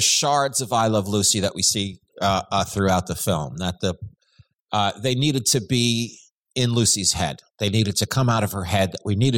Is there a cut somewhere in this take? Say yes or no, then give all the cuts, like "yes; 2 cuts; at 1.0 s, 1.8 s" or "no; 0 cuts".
no; 0 cuts